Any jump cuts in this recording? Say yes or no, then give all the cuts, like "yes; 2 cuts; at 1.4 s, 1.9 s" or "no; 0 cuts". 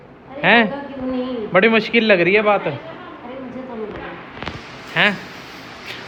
no; 0 cuts